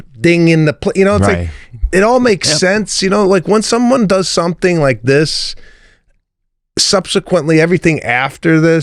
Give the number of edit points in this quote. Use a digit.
0